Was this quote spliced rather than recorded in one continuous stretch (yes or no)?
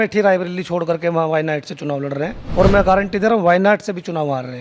yes